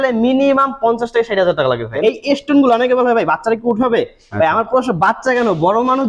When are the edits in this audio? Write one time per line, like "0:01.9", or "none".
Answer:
0:01.9